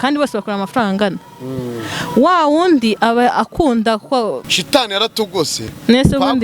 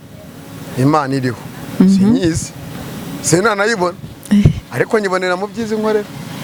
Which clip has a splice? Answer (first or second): first